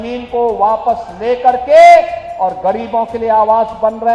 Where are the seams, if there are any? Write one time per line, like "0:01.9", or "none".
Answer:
none